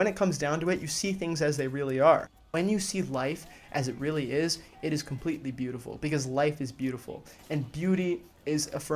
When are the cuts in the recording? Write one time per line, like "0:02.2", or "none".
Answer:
0:02.5